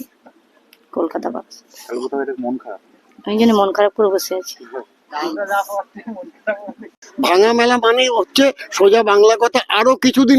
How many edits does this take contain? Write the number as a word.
one